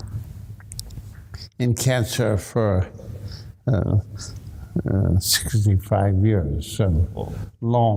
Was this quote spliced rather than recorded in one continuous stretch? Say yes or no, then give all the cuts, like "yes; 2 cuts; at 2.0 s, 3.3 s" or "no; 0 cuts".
no; 0 cuts